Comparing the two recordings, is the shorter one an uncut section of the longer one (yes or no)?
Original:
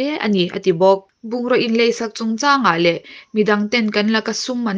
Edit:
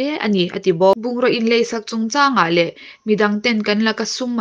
no